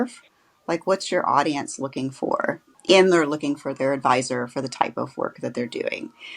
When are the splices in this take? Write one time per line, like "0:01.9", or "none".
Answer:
0:02.7